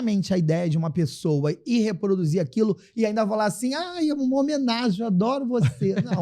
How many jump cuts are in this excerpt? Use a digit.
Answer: 0